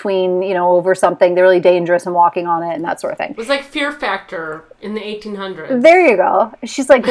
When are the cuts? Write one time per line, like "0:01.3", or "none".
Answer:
none